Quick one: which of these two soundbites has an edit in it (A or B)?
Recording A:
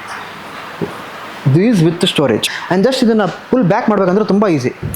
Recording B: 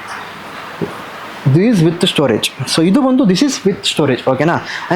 A